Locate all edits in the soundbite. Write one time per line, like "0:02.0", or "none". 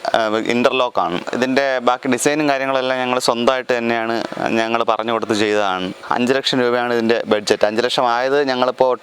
none